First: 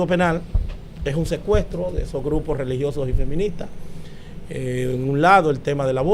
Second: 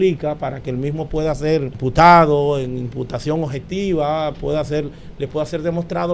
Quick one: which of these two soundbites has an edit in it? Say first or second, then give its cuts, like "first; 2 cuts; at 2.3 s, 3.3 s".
second; 1 cut; at 1.7 s